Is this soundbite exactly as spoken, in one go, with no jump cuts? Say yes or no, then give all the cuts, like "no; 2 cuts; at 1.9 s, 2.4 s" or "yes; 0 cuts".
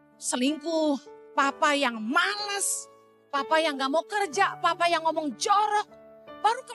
yes; 0 cuts